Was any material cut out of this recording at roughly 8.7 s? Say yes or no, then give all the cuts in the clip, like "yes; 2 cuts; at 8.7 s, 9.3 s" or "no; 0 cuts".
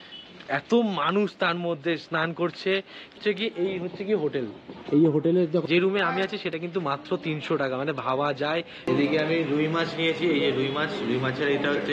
yes; 2 cuts; at 5.7 s, 8.7 s